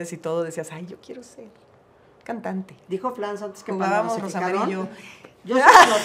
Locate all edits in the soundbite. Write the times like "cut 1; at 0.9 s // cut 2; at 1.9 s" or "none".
none